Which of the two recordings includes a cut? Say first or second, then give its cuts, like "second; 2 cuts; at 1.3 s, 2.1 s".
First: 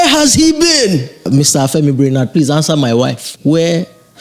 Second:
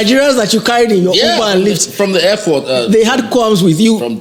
first; 2 cuts; at 1.3 s, 3.3 s